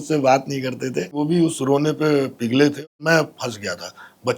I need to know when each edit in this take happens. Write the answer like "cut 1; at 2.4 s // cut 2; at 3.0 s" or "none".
cut 1; at 1.2 s // cut 2; at 2.8 s